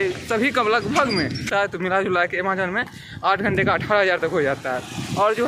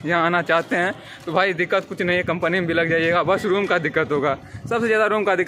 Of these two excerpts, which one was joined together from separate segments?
first; 1 cut; at 1.5 s

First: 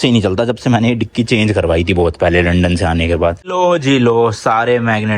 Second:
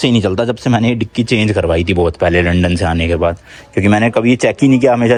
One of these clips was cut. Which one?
first; 1 cut; at 3.5 s

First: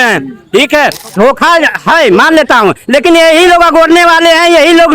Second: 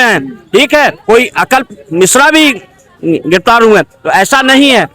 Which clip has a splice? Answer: first; 1 cut; at 1.0 s

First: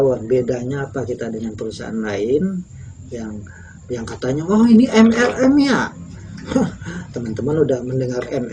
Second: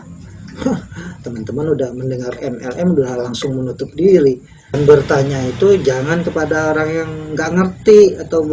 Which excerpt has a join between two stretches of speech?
second; 1 cut; at 4.8 s

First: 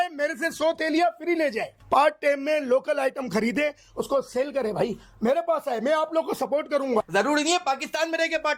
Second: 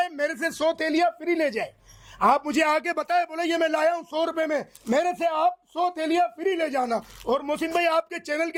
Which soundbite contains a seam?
first; 2 cuts; at 1.7 s, 7.0 s

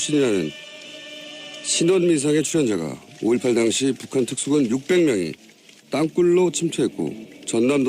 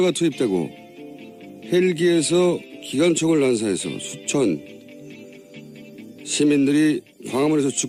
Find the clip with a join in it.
first; 1 cut; at 2.4 s

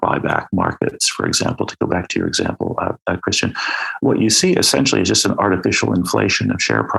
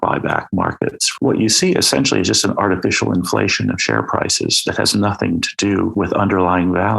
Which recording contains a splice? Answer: second; 2 cuts; at 1.1 s, 5.9 s

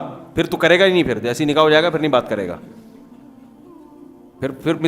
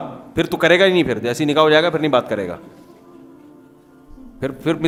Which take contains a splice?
first; 2 cuts; at 2.6 s, 4.2 s

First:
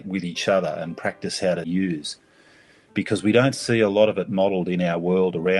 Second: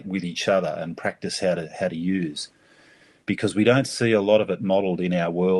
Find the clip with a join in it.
first; 1 cut; at 1.7 s

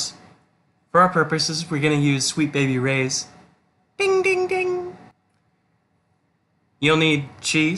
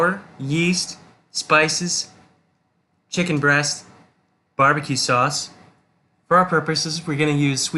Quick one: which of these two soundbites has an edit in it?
first; 1 cut; at 5.1 s

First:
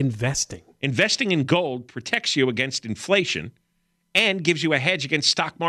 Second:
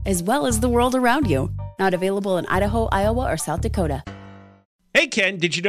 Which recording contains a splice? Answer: second; 1 cut; at 4.6 s

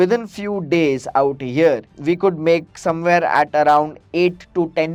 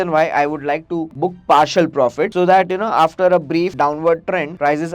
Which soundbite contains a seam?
second; 3 cuts; at 1.1 s, 2.3 s, 4.0 s

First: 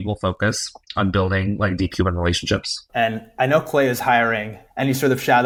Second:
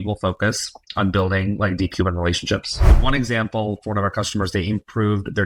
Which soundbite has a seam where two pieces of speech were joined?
second; 1 cut; at 2.9 s

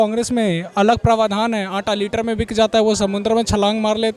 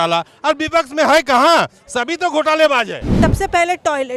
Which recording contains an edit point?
second; 1 cut; at 3.1 s

